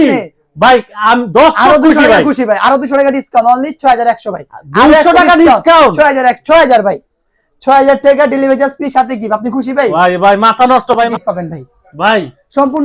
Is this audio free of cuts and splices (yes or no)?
no